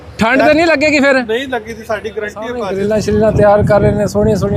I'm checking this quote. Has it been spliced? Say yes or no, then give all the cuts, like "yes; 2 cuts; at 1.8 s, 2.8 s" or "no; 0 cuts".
yes; 1 cut; at 2.6 s